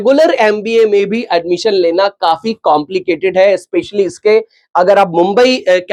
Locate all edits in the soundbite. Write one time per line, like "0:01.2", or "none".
none